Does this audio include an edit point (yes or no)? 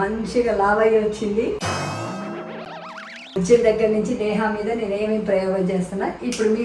yes